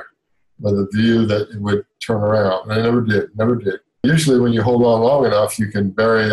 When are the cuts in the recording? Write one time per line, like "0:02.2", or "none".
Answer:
0:04.0